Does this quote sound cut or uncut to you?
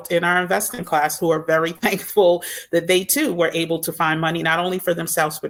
uncut